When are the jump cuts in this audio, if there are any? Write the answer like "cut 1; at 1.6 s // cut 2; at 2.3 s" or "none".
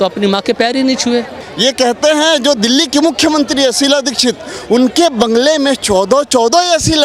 cut 1; at 1.4 s